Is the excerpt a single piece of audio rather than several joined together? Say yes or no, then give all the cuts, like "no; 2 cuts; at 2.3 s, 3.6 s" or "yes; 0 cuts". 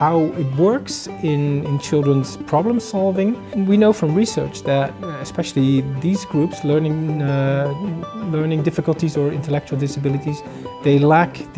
no; 1 cut; at 3.4 s